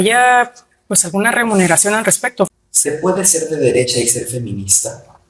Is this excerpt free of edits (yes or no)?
no